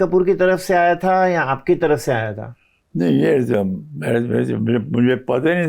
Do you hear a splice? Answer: no; 0 cuts

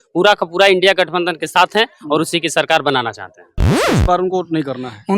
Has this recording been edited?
yes; 1 cut; at 3.7 s

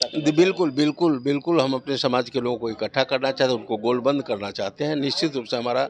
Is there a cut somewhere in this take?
no; 0 cuts

